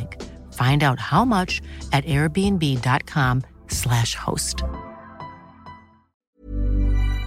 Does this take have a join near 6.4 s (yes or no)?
yes